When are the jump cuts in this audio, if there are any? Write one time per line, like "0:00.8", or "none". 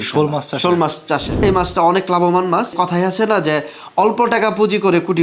0:01.4
0:02.7